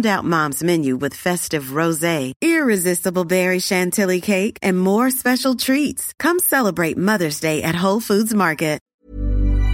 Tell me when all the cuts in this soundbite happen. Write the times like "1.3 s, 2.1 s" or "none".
8.8 s